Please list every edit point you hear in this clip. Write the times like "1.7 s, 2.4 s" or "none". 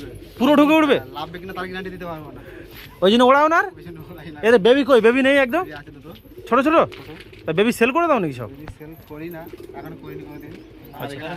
none

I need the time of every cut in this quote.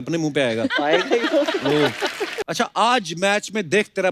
2.3 s

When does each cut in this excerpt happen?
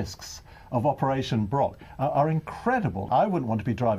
3.1 s

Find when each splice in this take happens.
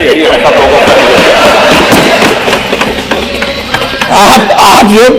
4.0 s

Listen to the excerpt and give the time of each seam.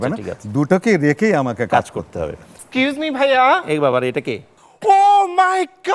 2.5 s

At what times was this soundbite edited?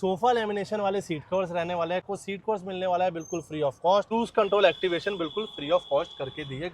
2.0 s, 4.1 s

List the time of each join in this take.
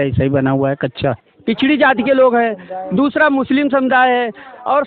1.3 s

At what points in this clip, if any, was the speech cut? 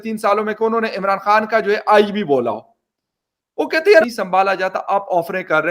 4.1 s

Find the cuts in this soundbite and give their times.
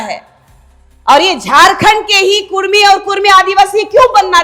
none

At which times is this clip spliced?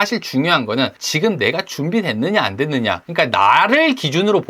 1.0 s, 3.0 s

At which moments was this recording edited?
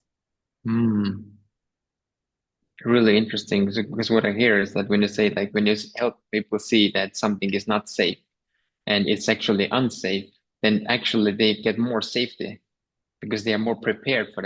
none

